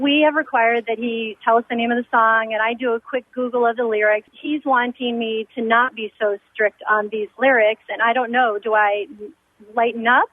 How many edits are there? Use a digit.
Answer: 1